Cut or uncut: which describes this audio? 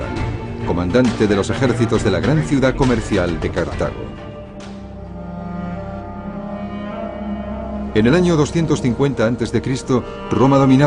cut